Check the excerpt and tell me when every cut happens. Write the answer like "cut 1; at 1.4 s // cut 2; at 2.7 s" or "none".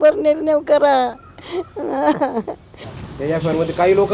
cut 1; at 2.9 s